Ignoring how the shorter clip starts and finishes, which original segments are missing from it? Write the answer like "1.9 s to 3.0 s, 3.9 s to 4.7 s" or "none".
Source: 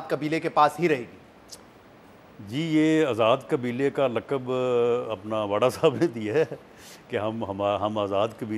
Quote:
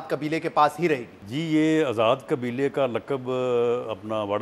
1.2 s to 2.4 s